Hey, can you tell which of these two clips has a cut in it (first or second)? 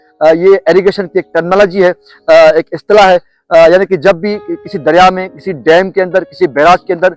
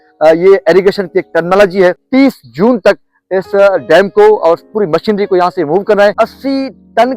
second